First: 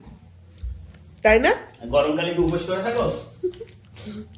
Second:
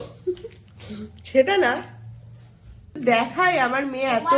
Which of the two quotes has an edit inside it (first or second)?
second